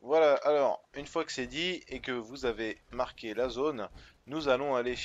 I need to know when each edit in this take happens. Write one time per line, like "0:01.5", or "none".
0:03.2